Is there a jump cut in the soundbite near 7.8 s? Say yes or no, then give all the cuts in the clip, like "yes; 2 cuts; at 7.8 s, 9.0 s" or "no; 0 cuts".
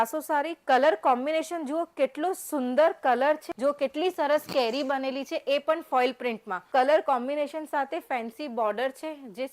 no; 2 cuts; at 3.5 s, 6.5 s